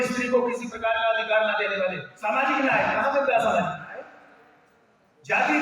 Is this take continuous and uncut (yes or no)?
no